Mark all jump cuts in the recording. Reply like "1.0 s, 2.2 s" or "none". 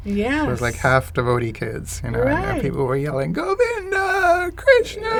none